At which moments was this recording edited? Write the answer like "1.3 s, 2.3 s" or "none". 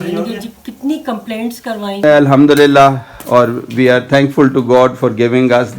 2.0 s